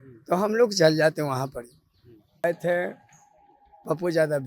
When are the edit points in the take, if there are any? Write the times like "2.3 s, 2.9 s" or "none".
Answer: 2.4 s